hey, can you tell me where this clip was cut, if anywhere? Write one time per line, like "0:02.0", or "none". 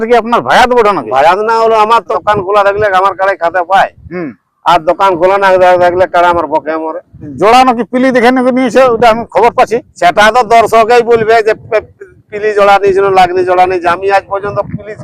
0:02.2
0:07.2